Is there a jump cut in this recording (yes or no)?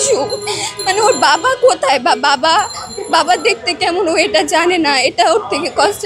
no